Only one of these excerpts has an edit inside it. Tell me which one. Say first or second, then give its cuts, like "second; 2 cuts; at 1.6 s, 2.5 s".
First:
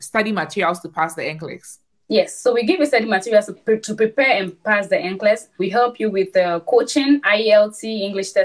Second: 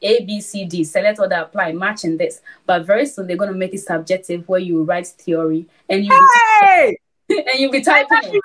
first; 2 cuts; at 3.5 s, 5.6 s